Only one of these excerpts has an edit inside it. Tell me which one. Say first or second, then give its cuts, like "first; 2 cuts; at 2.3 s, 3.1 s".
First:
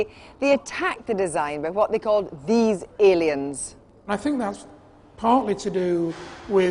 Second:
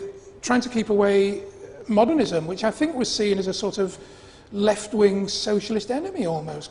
first; 1 cut; at 2.8 s